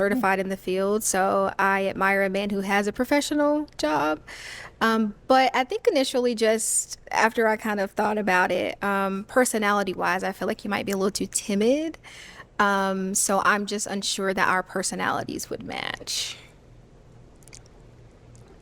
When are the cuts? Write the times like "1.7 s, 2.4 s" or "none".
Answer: none